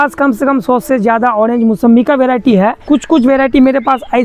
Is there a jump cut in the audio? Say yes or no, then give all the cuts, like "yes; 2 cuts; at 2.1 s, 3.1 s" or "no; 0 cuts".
yes; 1 cut; at 2.8 s